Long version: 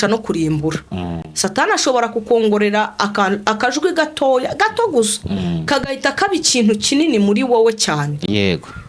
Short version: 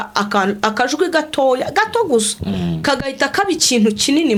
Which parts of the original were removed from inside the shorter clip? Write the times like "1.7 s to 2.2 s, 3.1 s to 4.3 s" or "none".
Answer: none